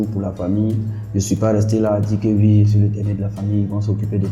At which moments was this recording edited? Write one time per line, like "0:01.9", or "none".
none